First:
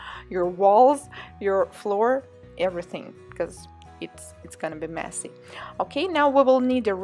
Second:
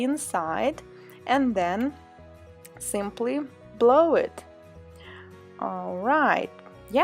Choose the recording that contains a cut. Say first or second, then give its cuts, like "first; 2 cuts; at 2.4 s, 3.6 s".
second; 1 cut; at 5.2 s